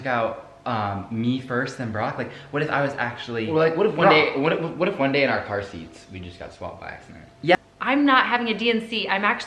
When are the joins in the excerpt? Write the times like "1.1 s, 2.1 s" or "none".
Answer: 7.6 s

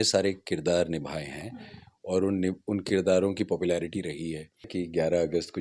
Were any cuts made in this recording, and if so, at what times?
4.7 s

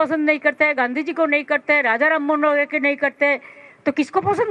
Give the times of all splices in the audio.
none

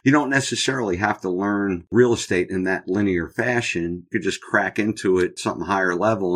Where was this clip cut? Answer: 1.9 s, 5.3 s

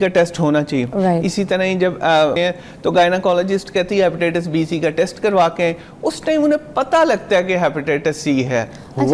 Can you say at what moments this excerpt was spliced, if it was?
2.4 s

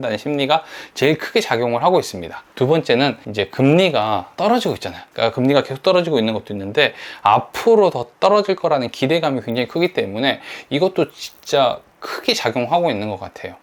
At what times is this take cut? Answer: none

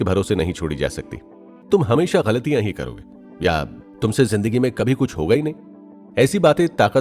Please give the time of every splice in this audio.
1.5 s

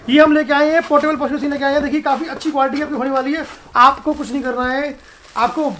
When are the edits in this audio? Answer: 3.6 s

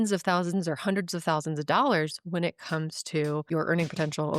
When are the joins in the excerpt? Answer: 3.5 s

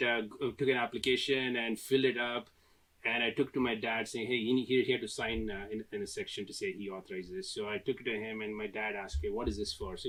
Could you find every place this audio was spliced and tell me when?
none

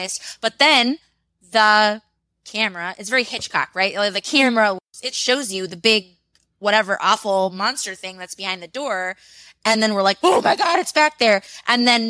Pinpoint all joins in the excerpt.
4.8 s

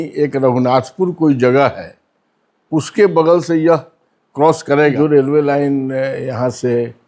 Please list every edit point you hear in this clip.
4.9 s

